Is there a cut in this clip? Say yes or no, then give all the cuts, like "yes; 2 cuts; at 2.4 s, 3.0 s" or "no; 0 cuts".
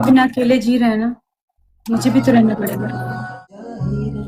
yes; 1 cut; at 3.2 s